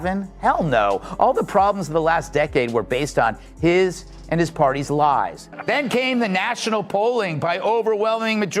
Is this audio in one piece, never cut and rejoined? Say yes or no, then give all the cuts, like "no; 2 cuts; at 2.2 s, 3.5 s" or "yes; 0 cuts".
no; 1 cut; at 5.5 s